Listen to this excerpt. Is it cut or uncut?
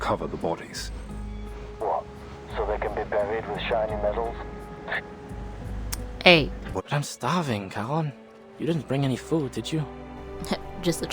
cut